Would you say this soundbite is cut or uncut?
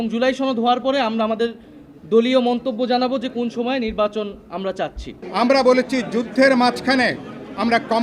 cut